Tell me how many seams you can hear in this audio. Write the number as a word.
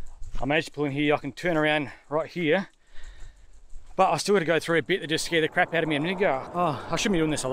one